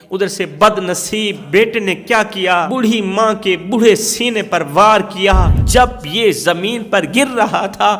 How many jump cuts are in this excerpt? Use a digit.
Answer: 3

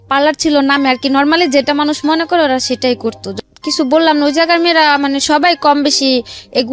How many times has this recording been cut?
1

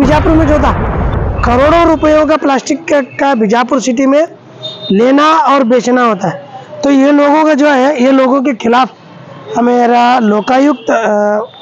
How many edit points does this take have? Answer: 1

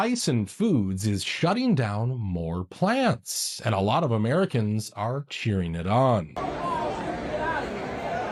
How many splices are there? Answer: 0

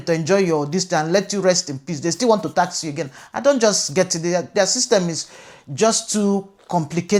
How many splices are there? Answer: 0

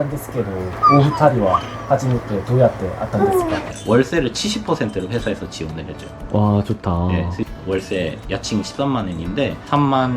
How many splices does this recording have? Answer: 2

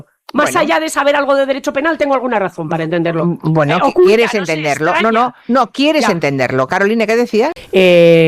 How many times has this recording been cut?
1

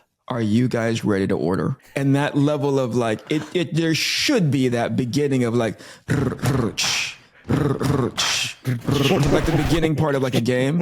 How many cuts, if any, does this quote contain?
1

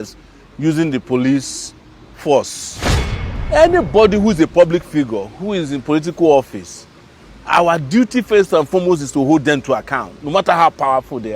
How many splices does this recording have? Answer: 1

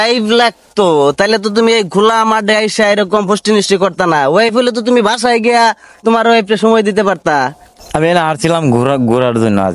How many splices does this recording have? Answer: 1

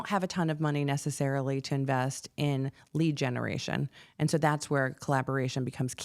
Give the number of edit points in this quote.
0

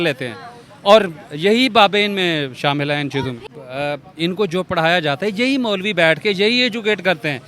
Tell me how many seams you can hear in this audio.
1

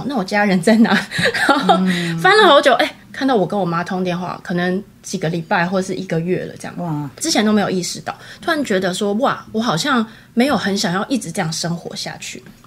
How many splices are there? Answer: 0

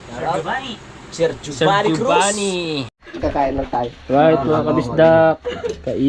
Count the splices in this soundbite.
1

